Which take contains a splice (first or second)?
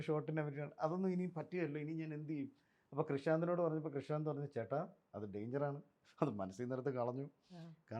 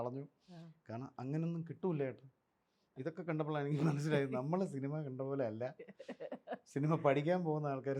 second